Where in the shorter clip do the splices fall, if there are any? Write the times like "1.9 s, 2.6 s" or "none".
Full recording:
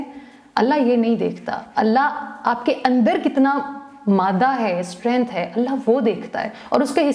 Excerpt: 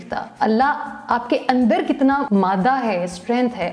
2.2 s

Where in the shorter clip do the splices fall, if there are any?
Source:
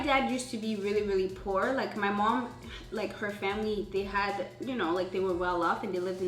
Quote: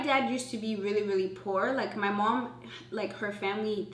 none

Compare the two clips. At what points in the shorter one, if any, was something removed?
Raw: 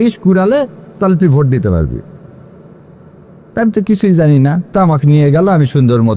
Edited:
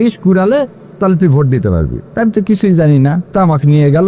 2.0 s

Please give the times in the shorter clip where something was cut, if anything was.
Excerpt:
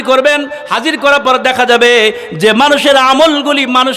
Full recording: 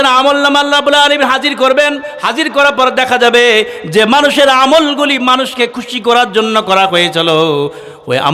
none

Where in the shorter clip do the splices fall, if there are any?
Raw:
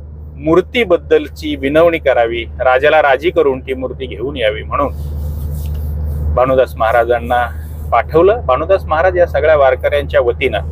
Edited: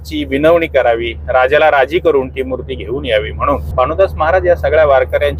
3.7 s

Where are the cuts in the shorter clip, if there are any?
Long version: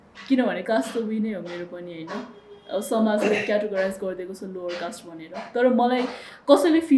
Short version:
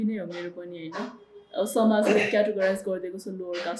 none

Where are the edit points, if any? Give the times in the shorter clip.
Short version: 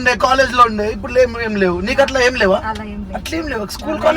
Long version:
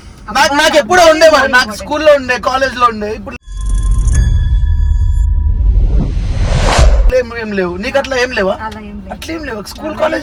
1.0 s

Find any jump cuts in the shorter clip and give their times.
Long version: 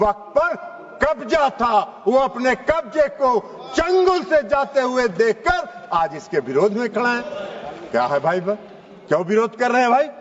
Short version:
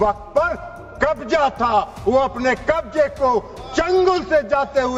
none

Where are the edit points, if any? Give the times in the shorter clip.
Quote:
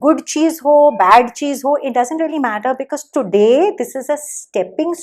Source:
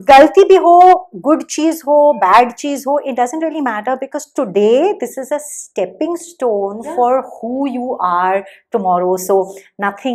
none

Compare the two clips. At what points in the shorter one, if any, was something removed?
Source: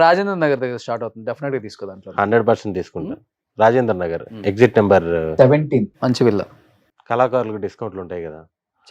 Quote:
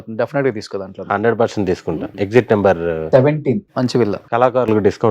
2.1 s, 4.2 s

